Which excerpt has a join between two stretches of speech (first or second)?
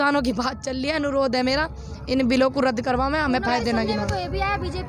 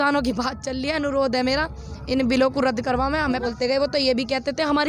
second